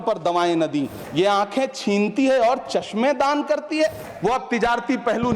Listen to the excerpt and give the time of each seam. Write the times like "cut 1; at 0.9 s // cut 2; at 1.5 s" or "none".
cut 1; at 1.0 s // cut 2; at 4.1 s